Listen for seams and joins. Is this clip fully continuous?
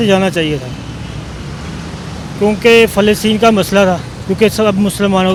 yes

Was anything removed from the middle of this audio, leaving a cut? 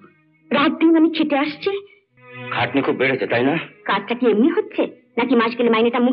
no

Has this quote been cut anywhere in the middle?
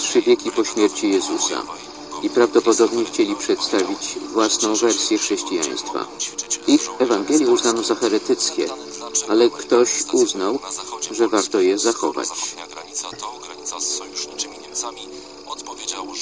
no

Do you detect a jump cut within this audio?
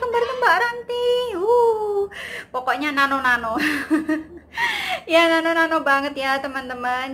no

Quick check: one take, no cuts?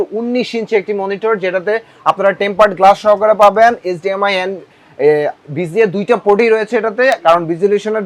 yes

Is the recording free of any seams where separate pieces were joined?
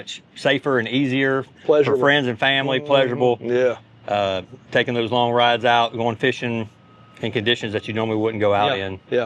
yes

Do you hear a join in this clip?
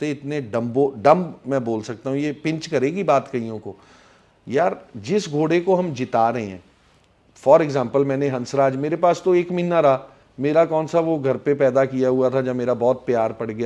no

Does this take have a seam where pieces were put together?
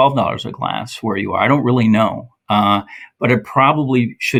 no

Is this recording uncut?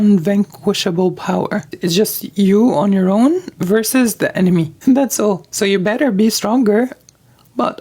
no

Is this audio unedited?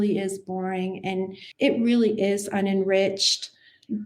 no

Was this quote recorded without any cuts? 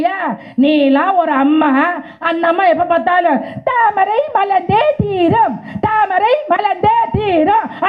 yes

